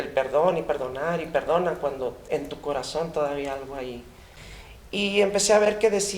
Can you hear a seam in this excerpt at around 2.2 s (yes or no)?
no